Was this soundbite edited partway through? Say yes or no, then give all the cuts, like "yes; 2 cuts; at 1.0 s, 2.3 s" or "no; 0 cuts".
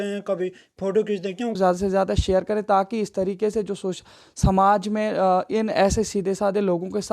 yes; 1 cut; at 1.6 s